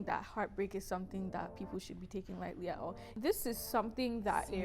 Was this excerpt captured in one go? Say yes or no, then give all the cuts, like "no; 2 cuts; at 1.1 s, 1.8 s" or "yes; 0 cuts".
no; 1 cut; at 3.0 s